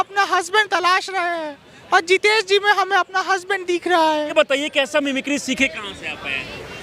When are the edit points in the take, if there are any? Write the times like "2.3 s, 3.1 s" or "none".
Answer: 4.6 s